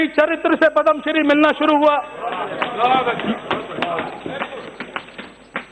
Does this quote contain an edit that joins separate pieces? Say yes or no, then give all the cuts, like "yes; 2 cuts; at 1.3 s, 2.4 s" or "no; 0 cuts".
no; 0 cuts